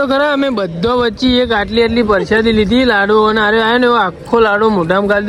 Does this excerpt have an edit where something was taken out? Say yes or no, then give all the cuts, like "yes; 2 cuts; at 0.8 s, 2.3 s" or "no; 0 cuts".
no; 0 cuts